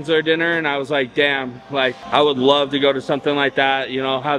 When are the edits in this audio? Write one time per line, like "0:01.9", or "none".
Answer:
none